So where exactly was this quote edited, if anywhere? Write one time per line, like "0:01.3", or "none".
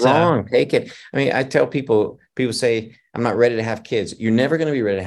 none